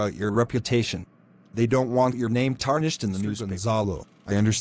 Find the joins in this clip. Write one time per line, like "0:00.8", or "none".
0:03.5